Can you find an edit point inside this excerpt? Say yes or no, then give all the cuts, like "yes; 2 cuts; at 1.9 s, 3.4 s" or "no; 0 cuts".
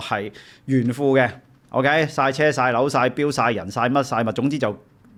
no; 0 cuts